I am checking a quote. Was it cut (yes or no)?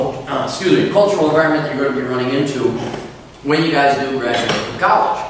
no